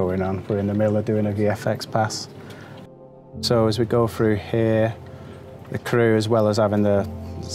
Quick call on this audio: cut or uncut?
uncut